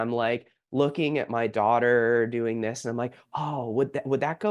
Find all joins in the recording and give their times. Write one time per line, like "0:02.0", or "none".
none